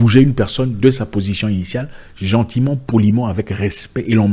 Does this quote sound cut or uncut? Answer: uncut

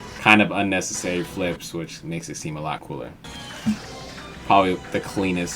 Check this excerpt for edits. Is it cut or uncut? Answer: cut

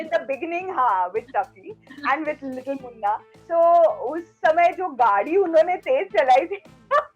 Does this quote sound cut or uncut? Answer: cut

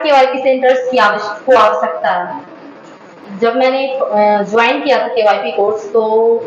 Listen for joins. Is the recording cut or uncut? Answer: cut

